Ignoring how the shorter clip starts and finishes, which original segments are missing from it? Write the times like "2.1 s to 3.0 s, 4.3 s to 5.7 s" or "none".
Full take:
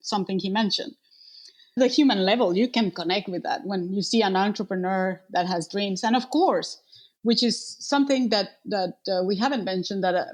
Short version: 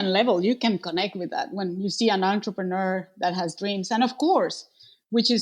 none